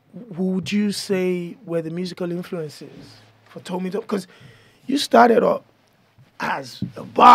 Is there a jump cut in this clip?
no; 0 cuts

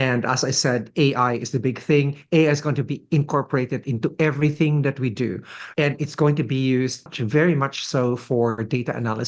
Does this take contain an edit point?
yes; 2 cuts; at 5.6 s, 7.2 s

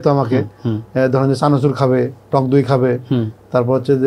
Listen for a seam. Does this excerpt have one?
no; 0 cuts

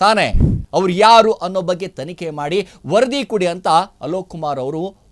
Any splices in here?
no; 0 cuts

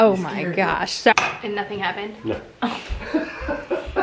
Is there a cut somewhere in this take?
yes; 1 cut; at 1.1 s

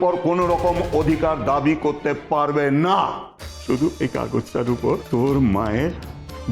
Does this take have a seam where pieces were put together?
yes; 2 cuts; at 3.9 s, 5.0 s

